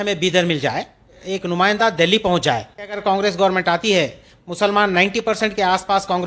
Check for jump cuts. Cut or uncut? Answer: cut